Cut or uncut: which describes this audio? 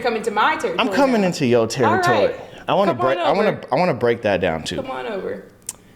uncut